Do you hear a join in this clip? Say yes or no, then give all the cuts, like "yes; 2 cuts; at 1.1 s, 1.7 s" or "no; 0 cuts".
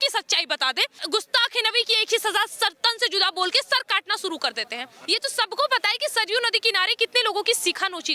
yes; 2 cuts; at 1.0 s, 4.9 s